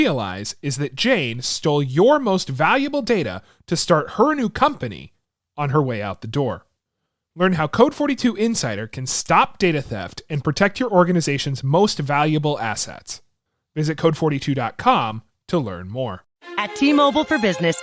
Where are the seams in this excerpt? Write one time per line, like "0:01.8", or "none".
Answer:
0:16.3